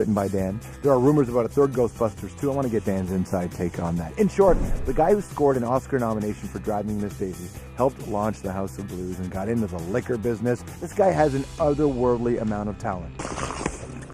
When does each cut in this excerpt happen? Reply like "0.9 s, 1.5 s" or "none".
10.2 s